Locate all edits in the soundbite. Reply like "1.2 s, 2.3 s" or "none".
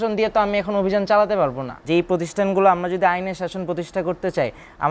1.7 s